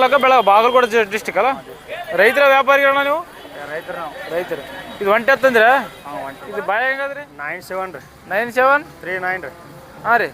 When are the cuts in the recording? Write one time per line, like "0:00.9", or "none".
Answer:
0:07.3